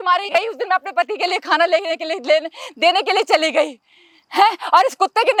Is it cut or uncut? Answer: uncut